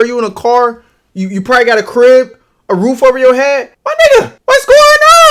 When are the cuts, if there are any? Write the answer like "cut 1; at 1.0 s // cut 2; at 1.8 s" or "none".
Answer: cut 1; at 3.8 s // cut 2; at 4.4 s